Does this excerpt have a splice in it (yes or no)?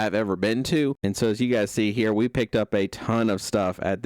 yes